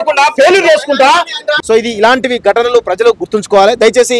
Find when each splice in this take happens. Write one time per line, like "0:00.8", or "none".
0:01.4